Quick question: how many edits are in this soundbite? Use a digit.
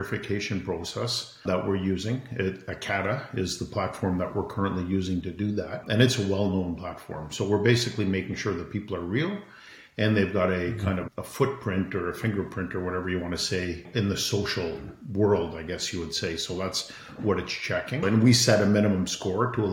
5